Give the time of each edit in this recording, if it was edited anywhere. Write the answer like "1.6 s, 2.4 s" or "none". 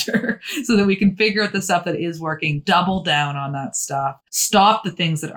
4.3 s